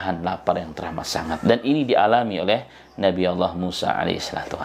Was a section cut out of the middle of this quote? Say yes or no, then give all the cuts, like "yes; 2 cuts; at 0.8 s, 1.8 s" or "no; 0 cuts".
no; 0 cuts